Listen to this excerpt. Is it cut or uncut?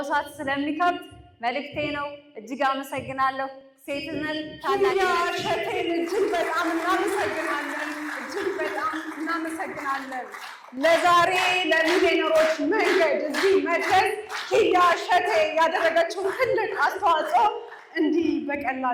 uncut